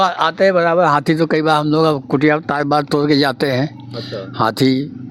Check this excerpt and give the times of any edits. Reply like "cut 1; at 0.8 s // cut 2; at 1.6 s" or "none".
none